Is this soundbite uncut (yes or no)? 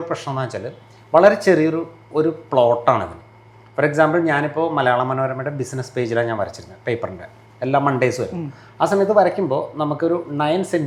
yes